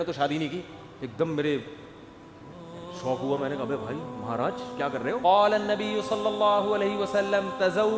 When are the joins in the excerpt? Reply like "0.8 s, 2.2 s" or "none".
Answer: 5.2 s